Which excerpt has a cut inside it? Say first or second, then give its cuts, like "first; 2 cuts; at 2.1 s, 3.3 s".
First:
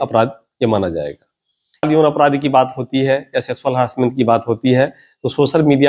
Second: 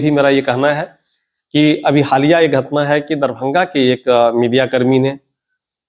first; 1 cut; at 1.9 s